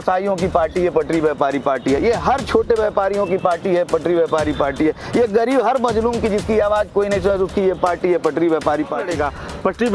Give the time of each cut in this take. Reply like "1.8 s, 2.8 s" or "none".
9.0 s